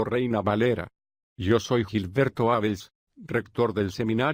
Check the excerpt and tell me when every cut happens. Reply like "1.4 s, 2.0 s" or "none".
none